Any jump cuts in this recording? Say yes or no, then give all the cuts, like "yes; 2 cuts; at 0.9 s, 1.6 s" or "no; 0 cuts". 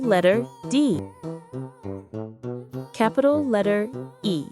yes; 2 cuts; at 1.0 s, 2.9 s